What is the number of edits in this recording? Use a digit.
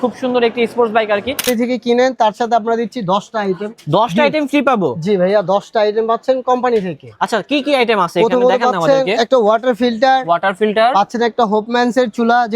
1